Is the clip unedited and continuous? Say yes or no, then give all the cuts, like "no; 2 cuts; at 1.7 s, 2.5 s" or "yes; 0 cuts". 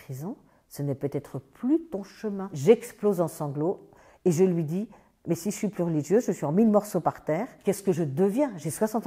yes; 0 cuts